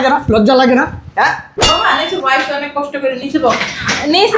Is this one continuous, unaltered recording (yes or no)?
no